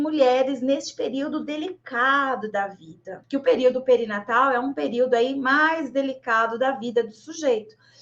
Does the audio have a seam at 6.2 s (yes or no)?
no